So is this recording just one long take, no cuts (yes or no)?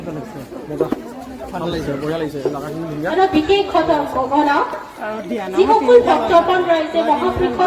yes